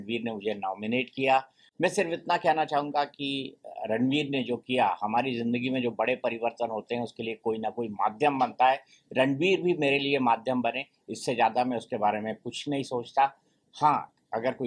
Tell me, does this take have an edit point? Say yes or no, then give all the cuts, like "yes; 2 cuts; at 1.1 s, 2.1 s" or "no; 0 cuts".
no; 0 cuts